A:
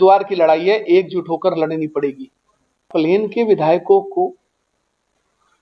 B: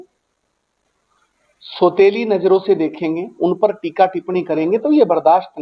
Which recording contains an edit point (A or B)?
A